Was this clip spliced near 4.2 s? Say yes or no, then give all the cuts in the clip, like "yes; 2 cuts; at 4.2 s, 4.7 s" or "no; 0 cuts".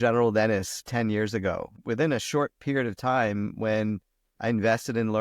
no; 2 cuts; at 0.9 s, 1.8 s